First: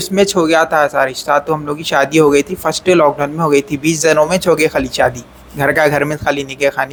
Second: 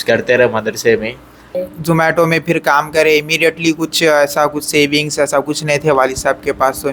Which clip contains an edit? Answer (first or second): second